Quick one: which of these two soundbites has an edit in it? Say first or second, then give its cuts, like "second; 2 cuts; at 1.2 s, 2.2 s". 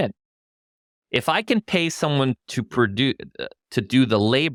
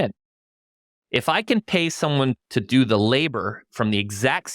second; 1 cut; at 2.4 s